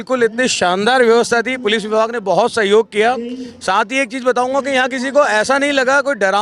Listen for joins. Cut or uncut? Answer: uncut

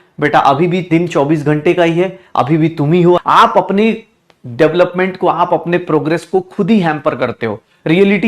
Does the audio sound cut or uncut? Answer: cut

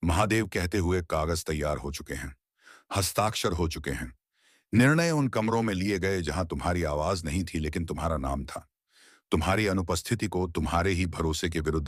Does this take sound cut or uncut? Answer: uncut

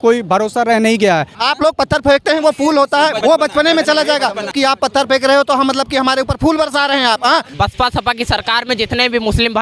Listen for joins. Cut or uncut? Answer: cut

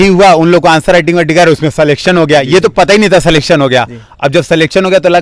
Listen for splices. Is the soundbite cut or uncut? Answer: uncut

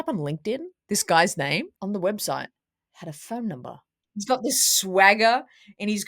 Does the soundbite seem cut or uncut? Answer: cut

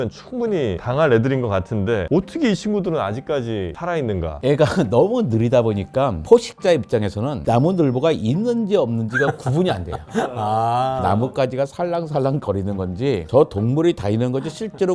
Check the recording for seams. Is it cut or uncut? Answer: cut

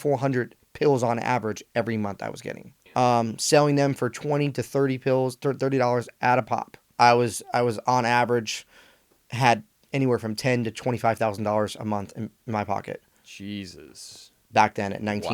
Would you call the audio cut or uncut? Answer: cut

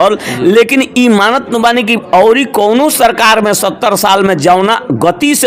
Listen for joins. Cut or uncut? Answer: uncut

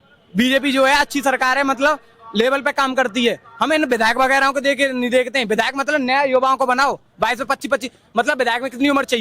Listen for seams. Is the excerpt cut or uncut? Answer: uncut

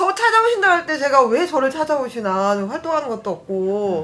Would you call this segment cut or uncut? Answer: uncut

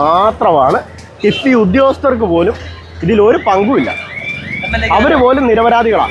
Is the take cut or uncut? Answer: uncut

